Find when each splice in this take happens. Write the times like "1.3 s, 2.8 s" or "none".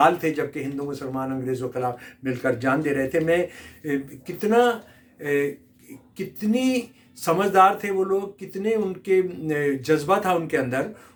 none